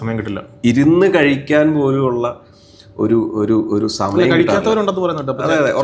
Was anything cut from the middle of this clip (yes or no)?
no